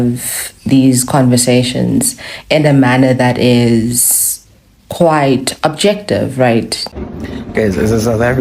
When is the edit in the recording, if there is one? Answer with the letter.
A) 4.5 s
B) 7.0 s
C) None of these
B